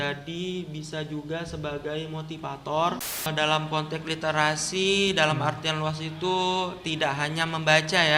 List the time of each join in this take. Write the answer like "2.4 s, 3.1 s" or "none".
3.2 s